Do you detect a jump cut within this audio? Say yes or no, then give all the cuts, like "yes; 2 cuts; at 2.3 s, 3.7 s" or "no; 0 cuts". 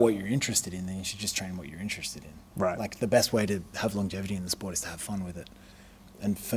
no; 0 cuts